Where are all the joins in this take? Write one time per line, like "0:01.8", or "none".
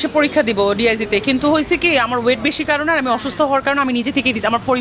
none